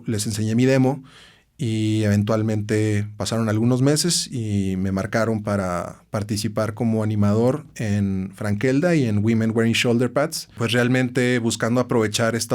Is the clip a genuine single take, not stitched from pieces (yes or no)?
no